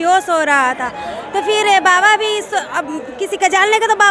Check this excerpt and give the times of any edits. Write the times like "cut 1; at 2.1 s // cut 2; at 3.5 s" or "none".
none